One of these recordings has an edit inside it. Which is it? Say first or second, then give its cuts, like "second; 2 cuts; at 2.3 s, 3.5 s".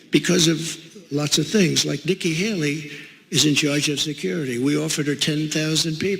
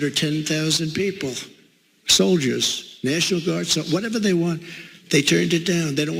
first; 1 cut; at 1.8 s